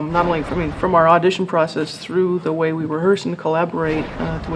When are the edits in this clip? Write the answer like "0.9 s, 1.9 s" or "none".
none